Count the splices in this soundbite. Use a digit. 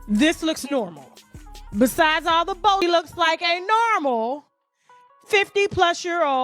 1